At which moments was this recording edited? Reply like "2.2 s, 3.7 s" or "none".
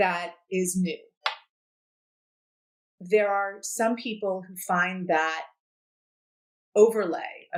none